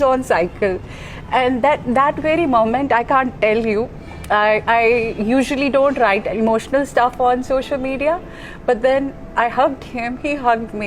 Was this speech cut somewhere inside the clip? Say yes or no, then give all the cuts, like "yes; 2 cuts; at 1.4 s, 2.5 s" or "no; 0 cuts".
no; 0 cuts